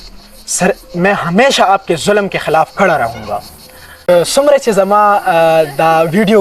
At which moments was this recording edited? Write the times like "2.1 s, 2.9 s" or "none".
3.9 s